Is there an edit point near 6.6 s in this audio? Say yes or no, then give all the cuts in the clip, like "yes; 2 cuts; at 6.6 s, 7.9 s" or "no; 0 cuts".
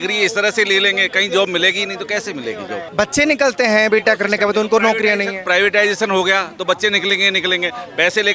no; 1 cut; at 2.8 s